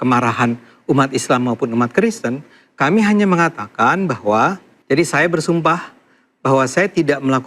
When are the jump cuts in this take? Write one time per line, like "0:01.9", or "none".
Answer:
0:04.7